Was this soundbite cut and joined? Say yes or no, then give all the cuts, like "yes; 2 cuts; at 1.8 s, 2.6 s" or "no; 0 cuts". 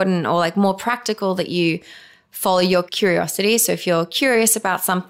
yes; 1 cut; at 2.9 s